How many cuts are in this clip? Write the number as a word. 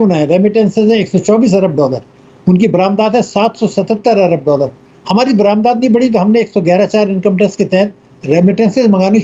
zero